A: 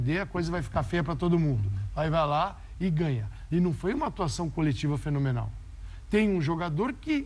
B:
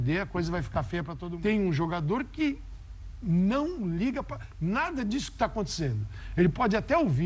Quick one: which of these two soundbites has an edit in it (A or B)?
B